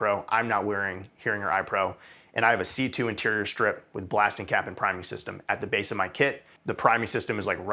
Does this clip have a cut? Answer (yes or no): yes